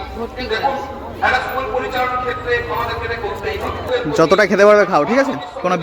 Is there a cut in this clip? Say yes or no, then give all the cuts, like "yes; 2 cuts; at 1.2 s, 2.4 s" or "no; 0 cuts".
yes; 1 cut; at 3.9 s